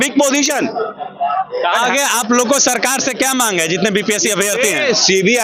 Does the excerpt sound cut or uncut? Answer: uncut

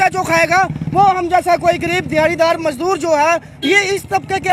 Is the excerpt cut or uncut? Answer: uncut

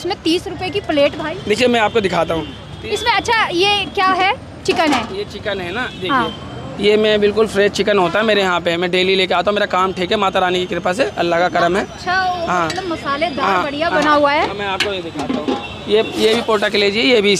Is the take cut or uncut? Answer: uncut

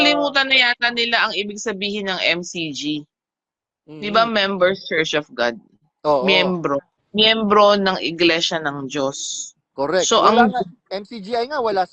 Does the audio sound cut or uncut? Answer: cut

